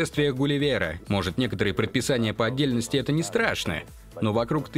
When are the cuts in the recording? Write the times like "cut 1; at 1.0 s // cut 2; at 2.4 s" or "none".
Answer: cut 1; at 1.0 s